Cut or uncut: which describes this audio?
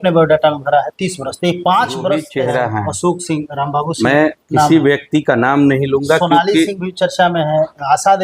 cut